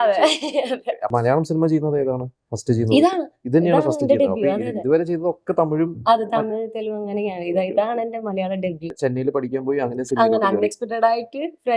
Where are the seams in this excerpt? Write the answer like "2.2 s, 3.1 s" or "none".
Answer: 1.1 s, 8.8 s